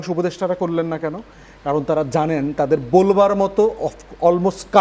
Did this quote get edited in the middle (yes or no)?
no